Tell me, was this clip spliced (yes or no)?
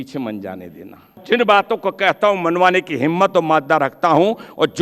yes